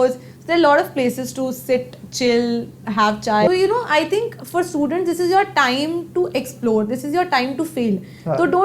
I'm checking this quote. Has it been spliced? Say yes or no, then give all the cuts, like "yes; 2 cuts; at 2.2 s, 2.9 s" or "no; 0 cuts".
yes; 1 cut; at 3.5 s